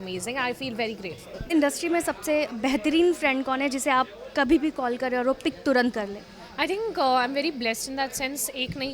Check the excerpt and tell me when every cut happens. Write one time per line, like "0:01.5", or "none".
0:01.3